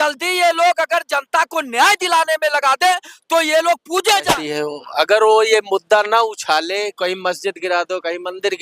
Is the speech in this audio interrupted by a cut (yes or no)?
yes